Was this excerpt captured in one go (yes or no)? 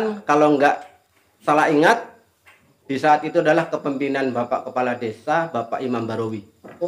yes